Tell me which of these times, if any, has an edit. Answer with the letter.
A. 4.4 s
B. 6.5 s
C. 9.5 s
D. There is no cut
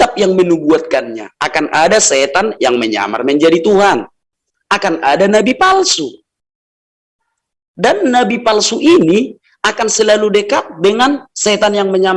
D